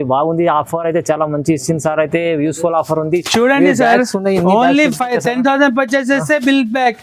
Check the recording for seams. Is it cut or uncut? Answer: uncut